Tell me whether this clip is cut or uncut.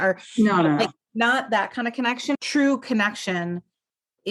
cut